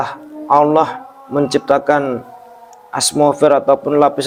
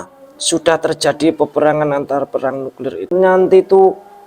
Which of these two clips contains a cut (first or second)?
second